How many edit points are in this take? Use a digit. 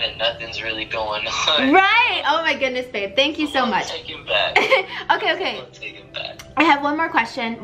0